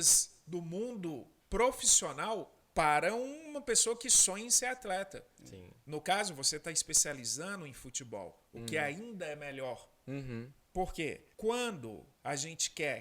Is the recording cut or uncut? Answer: cut